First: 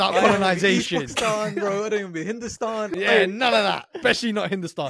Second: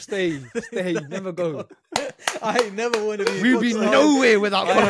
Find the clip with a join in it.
first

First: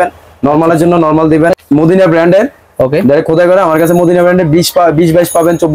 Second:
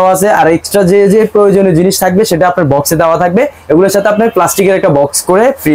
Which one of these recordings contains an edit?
first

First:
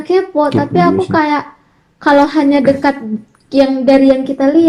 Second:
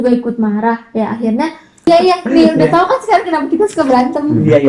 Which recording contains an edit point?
second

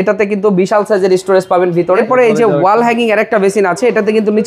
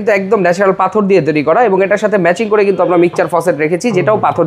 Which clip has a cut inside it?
first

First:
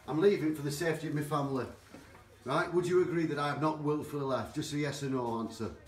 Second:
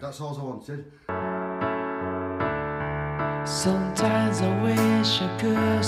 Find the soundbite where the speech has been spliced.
second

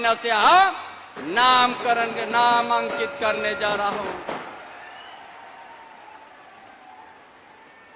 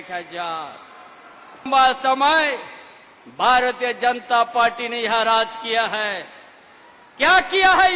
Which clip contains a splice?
second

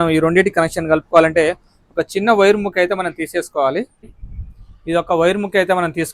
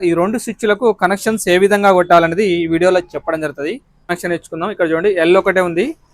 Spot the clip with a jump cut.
second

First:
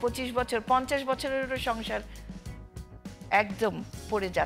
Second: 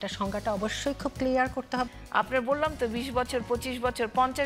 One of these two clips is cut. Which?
second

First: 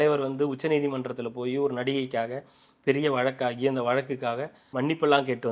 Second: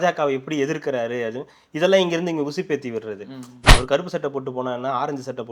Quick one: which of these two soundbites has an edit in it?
second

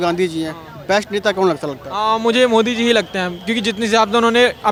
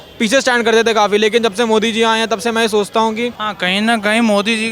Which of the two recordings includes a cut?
second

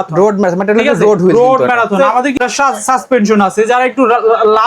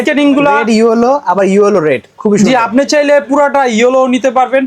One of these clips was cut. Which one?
first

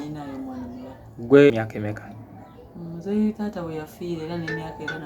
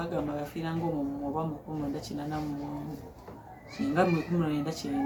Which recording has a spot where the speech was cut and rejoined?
first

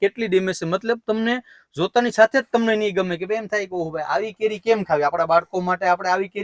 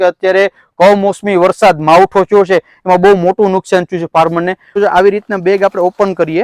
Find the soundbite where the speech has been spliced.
second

